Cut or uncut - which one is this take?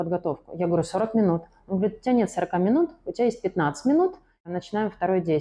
cut